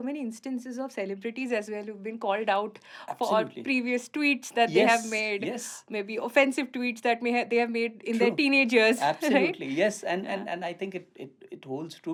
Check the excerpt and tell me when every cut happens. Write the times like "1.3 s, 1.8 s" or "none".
none